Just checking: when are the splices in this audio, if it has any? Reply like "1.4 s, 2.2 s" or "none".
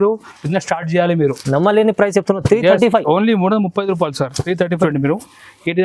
4.8 s